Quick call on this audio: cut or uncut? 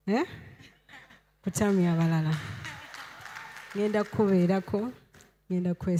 uncut